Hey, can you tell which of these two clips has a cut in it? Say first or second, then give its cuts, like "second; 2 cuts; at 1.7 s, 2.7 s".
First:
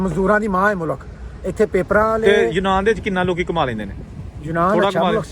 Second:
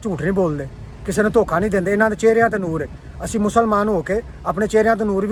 first; 1 cut; at 2.2 s